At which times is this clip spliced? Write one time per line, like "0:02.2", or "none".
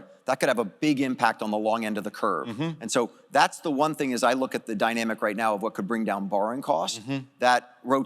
none